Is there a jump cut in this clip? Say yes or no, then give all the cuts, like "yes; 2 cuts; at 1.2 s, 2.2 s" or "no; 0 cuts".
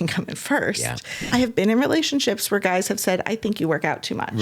yes; 1 cut; at 1.2 s